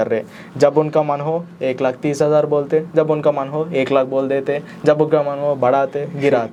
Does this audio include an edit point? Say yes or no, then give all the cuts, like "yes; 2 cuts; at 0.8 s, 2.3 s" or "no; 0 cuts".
no; 0 cuts